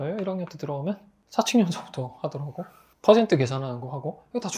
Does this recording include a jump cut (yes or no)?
no